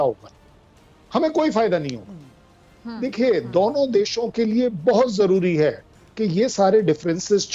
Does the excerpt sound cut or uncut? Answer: uncut